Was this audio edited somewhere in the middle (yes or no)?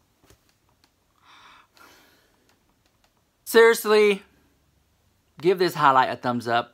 yes